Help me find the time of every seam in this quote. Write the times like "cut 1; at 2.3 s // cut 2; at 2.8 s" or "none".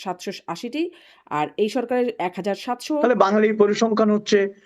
cut 1; at 3.0 s